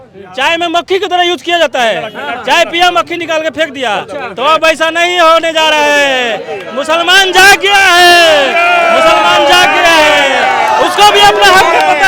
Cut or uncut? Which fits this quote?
uncut